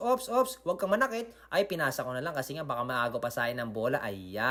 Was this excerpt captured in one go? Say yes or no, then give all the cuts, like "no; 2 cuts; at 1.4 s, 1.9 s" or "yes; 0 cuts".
yes; 0 cuts